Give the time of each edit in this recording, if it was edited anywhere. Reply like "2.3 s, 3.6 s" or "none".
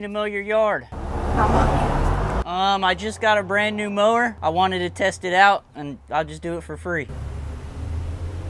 none